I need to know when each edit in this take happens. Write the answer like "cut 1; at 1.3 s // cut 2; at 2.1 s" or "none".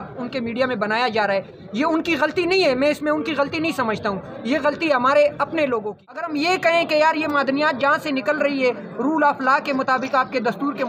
cut 1; at 6.3 s